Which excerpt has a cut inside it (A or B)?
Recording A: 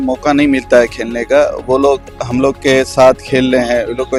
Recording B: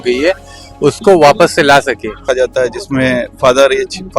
B